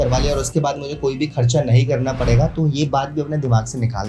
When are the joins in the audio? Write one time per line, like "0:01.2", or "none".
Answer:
none